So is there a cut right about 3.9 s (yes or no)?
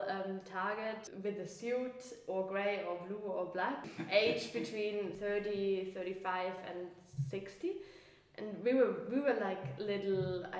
yes